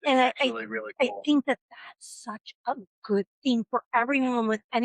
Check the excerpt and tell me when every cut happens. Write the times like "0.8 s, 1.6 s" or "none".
none

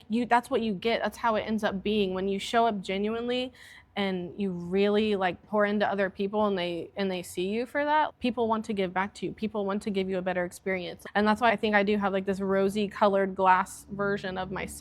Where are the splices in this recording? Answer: 5.4 s, 8.1 s, 11.3 s

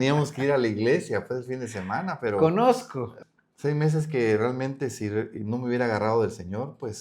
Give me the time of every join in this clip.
3.0 s

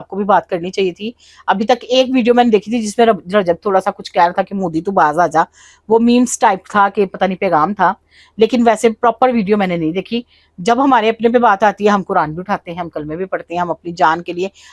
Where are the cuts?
none

